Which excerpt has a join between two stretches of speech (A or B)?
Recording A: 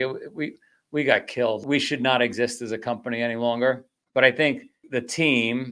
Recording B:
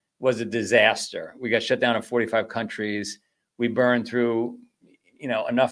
A